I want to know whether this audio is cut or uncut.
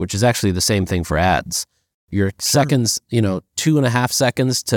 uncut